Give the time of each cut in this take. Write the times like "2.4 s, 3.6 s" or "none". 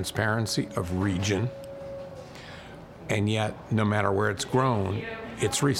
none